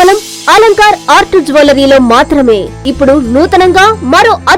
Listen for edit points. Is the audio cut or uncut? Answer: cut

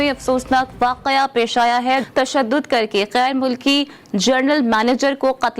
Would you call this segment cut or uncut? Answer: cut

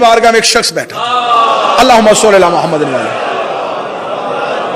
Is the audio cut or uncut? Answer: uncut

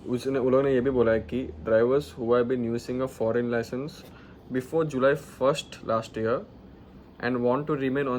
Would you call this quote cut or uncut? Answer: uncut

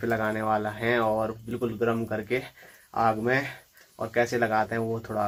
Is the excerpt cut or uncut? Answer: uncut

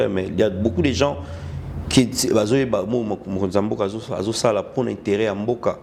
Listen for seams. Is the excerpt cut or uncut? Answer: uncut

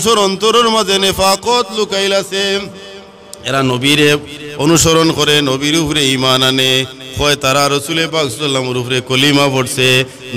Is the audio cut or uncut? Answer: uncut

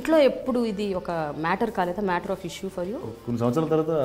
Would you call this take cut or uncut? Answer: cut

